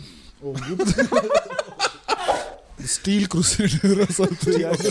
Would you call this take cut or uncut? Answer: cut